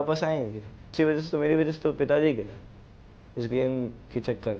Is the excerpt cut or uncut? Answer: cut